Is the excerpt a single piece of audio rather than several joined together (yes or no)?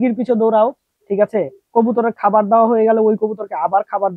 yes